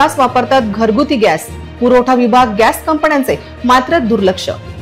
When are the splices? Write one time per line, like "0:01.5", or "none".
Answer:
none